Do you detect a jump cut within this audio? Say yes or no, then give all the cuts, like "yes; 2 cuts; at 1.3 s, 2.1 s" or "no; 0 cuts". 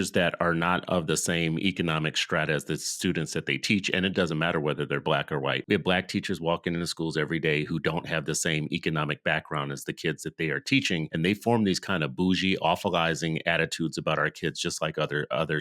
yes; 2 cuts; at 5.6 s, 11.1 s